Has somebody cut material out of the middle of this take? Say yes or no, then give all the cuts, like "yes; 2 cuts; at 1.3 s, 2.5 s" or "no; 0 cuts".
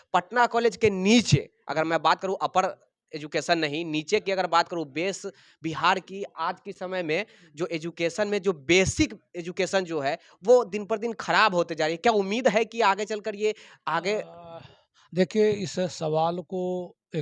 no; 0 cuts